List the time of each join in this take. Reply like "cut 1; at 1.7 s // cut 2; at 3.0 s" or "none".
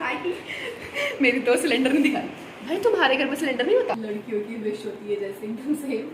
cut 1; at 4.0 s